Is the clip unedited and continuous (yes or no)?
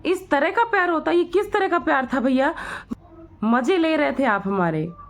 no